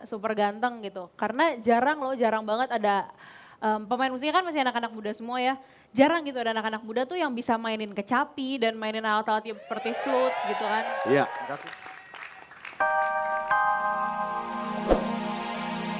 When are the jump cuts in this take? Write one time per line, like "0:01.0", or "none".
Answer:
0:12.6